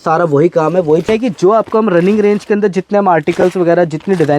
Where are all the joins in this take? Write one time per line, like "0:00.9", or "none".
0:01.1